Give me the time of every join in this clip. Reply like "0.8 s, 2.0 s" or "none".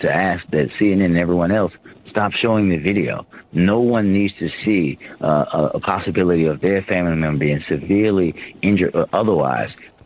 none